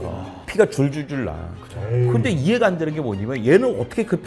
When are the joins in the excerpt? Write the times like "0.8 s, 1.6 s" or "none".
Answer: none